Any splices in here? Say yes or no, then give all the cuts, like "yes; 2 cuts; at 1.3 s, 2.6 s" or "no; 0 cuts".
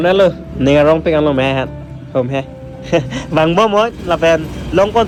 no; 0 cuts